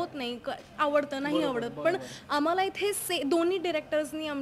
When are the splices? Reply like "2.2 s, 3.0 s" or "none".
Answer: none